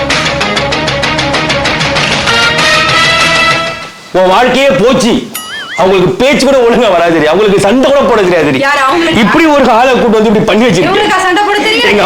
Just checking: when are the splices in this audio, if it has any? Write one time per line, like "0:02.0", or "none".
0:05.6